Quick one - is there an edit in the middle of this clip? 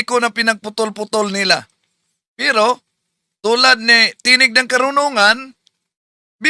yes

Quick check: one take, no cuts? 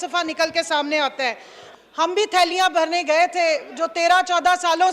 no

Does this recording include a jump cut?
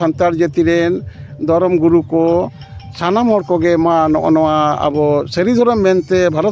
no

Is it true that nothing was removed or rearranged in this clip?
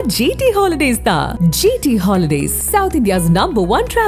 yes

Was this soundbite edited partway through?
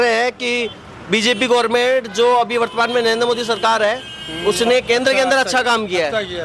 no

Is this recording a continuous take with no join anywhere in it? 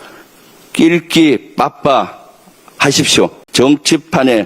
no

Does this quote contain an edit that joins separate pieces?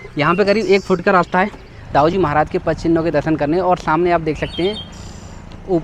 yes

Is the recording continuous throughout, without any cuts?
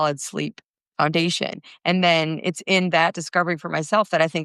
yes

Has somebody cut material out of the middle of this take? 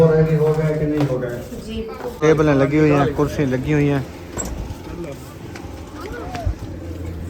yes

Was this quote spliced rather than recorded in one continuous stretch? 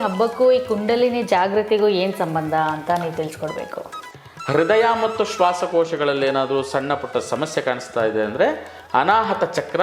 yes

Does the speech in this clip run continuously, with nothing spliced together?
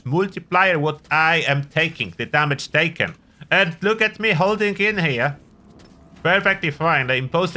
yes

